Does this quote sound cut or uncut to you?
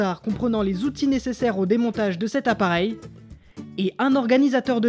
uncut